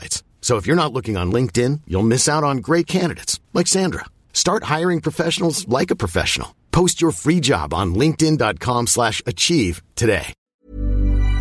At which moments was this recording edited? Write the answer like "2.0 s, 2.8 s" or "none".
10.4 s